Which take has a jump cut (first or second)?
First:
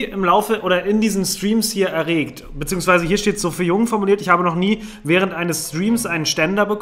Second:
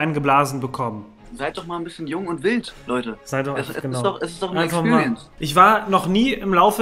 second